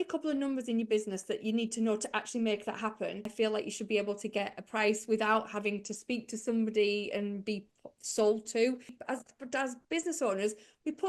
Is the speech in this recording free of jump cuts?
no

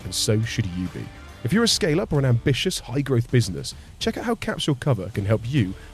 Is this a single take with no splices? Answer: yes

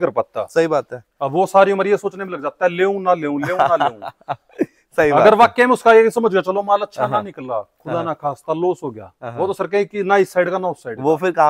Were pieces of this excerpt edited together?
no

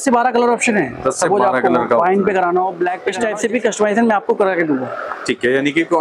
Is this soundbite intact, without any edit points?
no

